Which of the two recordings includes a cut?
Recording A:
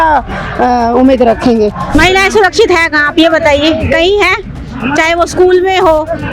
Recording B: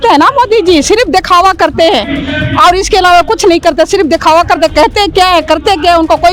A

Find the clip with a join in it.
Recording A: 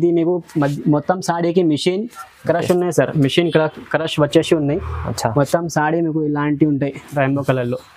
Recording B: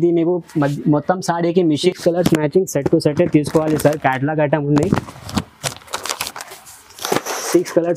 B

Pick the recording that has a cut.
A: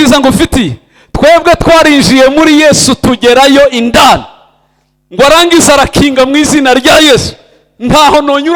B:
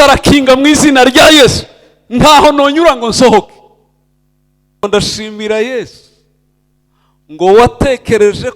B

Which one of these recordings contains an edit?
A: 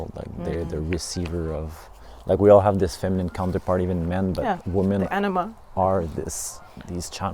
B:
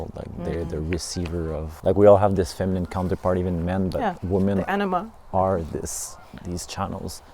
B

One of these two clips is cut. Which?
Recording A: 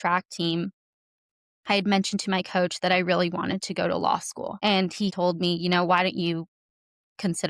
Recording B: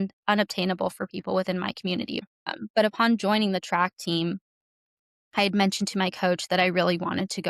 B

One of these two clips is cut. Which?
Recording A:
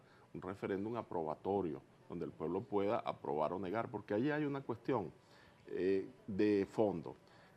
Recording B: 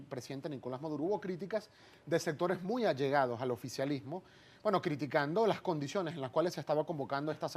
A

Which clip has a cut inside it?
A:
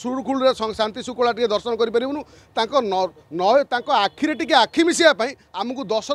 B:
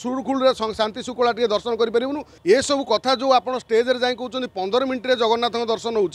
B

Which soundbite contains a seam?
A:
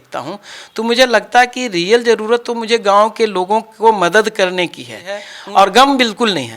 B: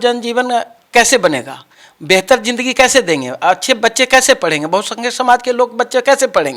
A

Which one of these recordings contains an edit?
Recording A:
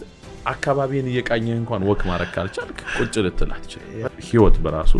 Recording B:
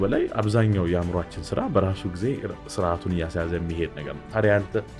A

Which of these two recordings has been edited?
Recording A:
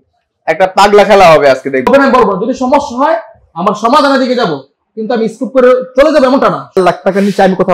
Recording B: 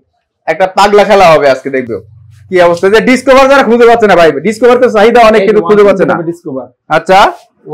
A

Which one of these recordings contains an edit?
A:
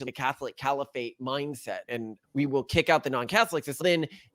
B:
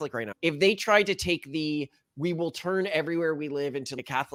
A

